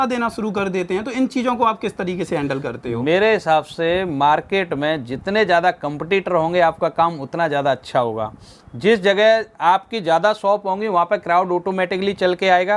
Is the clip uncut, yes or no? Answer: yes